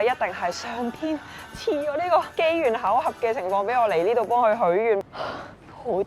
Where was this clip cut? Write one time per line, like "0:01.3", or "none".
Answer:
0:05.0

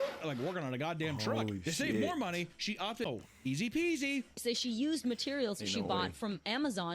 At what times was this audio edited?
0:03.1

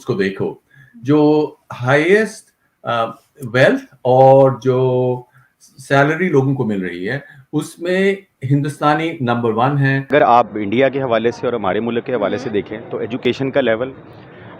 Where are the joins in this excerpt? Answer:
0:10.1

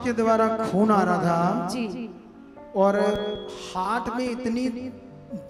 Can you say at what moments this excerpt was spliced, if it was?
none

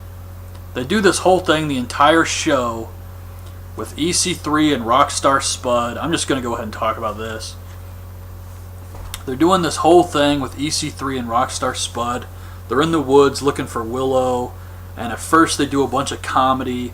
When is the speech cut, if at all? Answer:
0:13.2

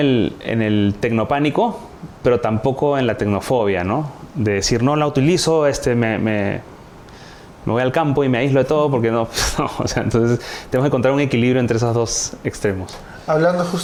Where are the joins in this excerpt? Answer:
none

